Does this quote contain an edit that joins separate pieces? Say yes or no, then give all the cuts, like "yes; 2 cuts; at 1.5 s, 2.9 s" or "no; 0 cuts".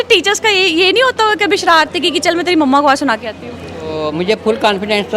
yes; 1 cut; at 4.0 s